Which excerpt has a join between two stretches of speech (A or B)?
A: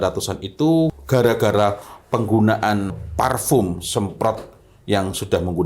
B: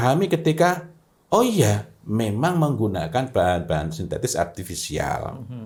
A